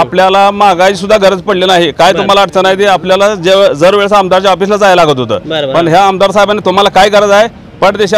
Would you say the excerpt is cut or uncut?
uncut